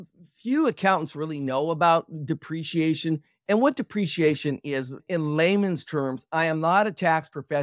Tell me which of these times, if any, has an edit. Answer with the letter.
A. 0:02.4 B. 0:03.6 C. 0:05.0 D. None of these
C